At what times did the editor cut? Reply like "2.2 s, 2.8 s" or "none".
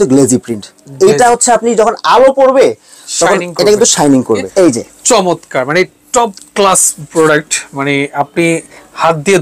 4.5 s, 7.0 s